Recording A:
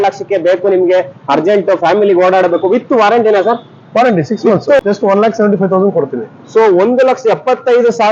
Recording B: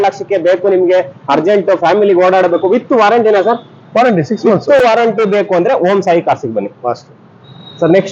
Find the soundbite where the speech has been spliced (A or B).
A